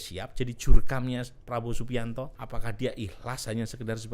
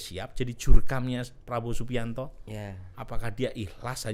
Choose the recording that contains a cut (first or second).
first